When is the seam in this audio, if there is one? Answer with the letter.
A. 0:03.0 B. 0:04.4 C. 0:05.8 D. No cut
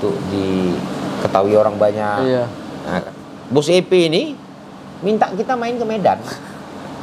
A